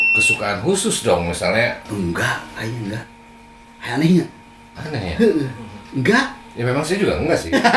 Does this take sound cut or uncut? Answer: uncut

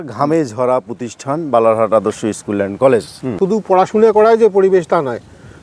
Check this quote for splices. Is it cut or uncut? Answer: cut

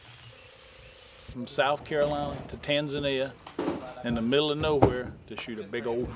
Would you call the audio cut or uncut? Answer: cut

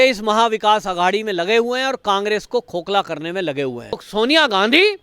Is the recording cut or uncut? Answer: cut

